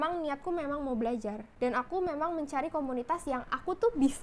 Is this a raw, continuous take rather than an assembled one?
yes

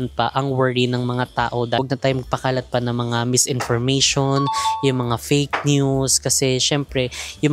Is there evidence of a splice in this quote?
yes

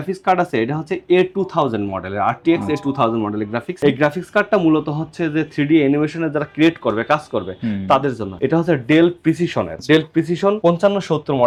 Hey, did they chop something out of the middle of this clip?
no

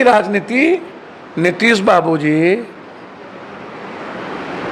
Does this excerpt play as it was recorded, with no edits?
yes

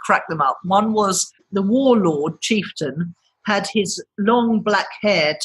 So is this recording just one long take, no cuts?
no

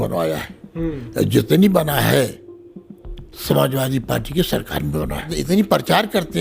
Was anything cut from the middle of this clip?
yes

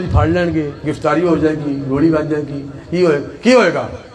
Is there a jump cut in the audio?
no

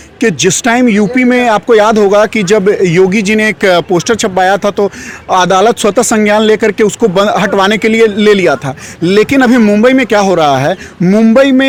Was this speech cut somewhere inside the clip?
no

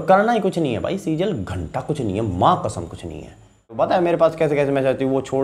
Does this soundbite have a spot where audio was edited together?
yes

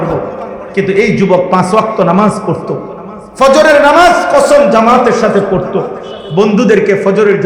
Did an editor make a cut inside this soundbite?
no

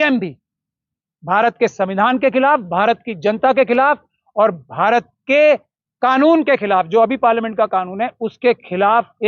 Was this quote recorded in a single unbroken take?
yes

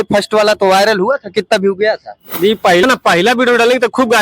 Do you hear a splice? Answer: yes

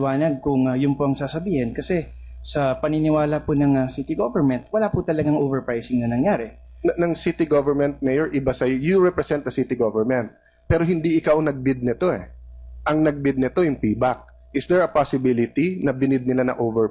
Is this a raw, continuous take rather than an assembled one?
no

